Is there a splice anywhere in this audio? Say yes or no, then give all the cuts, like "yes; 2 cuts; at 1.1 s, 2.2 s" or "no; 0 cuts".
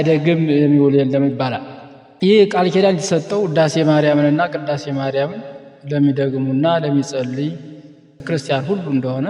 yes; 1 cut; at 8.2 s